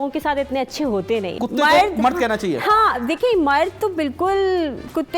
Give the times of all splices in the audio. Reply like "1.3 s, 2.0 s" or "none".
1.4 s